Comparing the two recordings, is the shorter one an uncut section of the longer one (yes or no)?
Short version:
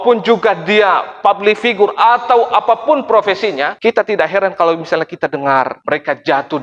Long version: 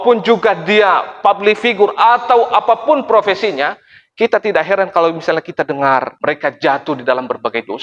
no